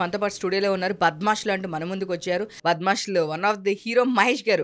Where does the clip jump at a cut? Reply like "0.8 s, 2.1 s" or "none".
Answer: 2.5 s